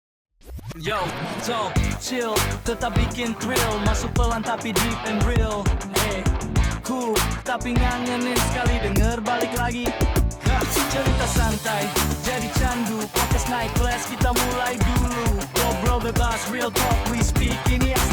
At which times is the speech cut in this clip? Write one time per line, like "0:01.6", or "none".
none